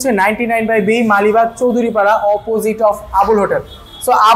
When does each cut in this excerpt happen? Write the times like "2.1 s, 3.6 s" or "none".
none